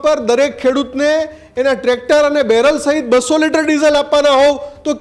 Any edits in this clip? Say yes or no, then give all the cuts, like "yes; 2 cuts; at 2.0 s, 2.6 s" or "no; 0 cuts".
no; 0 cuts